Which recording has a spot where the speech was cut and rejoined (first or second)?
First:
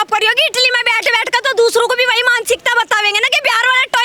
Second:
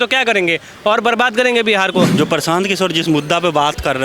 second